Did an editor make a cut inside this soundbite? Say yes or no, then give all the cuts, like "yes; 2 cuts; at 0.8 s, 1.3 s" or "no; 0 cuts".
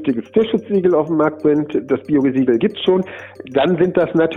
no; 0 cuts